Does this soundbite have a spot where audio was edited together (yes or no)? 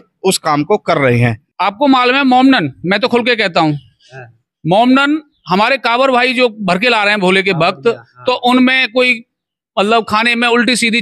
yes